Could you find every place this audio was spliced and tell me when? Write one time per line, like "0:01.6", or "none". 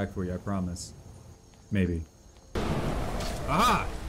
0:02.3